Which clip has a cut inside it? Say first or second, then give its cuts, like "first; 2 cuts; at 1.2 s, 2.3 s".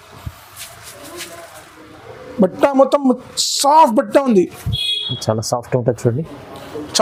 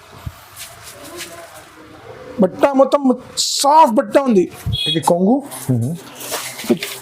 second; 1 cut; at 4.9 s